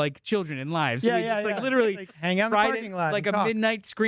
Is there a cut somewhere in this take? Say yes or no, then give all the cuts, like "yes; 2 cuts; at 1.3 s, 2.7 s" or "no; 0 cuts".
no; 0 cuts